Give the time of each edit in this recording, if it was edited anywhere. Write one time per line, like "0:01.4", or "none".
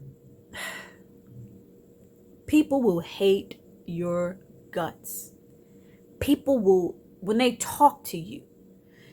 none